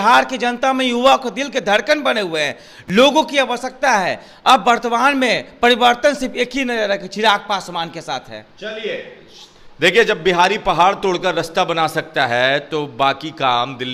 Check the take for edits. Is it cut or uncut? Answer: uncut